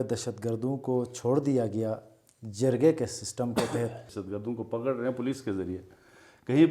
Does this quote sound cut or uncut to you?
cut